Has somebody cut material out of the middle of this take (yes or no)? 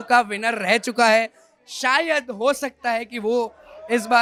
no